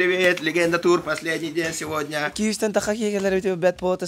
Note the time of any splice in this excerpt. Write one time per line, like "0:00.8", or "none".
0:02.3